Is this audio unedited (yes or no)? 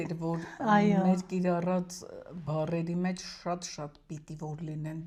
yes